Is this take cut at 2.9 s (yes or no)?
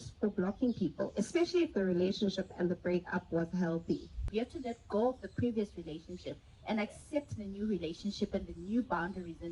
no